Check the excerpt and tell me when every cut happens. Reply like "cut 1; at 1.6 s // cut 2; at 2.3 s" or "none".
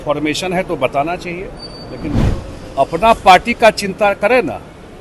cut 1; at 2.2 s